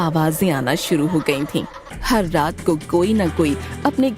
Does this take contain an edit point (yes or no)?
yes